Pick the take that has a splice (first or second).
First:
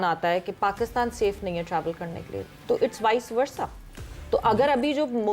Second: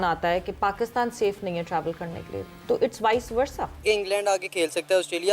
second